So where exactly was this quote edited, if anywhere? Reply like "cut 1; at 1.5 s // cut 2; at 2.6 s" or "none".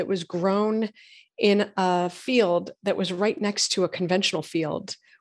none